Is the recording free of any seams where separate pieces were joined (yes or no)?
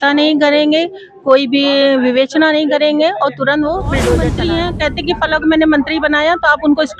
no